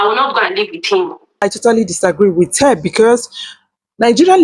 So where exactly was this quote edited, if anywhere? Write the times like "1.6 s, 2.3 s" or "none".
1.4 s